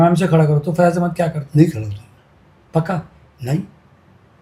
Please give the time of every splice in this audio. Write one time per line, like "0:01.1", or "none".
none